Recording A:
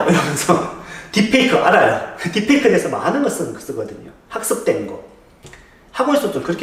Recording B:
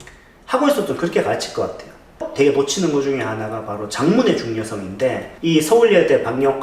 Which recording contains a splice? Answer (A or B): B